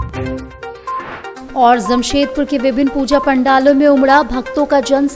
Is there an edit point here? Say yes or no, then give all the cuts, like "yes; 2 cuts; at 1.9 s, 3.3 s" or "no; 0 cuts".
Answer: yes; 1 cut; at 1.4 s